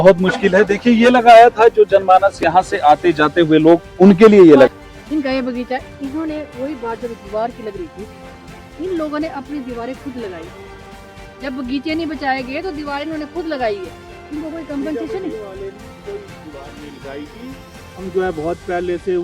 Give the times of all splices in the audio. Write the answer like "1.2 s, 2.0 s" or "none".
4.7 s